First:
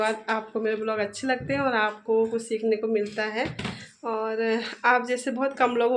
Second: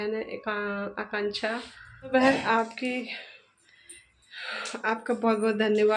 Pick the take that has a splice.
second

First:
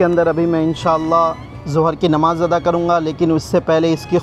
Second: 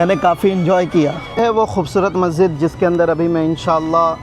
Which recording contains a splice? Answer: second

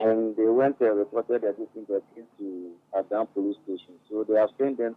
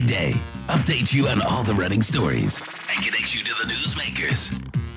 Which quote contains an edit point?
first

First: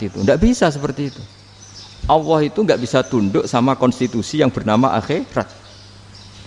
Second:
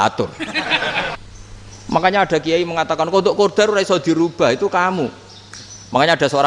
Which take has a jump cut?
second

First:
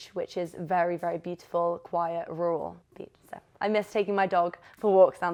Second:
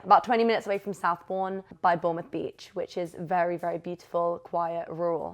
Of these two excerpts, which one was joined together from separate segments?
second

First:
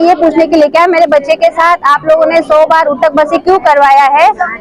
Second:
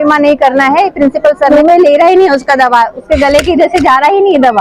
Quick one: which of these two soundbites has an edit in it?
second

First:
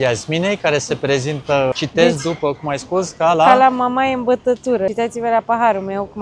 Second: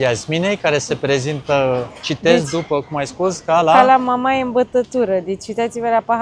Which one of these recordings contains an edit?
first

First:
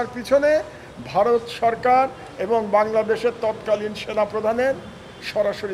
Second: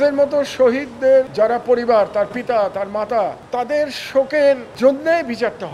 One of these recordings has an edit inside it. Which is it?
second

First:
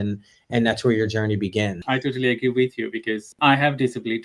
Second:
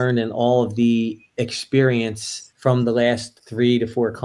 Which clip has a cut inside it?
first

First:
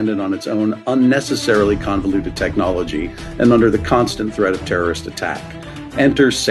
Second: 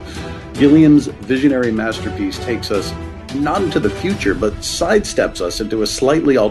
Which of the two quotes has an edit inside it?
second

